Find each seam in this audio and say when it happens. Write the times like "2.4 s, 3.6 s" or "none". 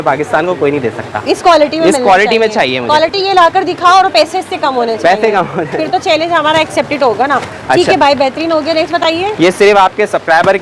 none